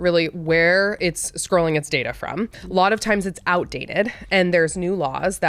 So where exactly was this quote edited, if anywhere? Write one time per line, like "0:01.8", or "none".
none